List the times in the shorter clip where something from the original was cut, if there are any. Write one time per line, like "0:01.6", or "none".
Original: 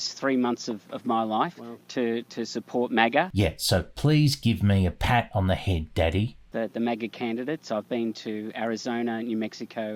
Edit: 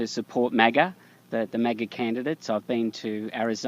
0:01.0